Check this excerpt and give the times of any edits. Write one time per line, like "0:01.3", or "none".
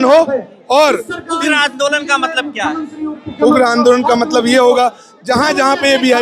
none